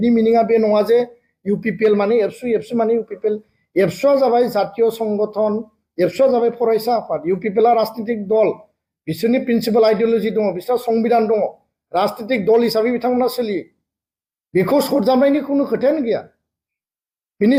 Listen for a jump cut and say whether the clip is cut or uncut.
uncut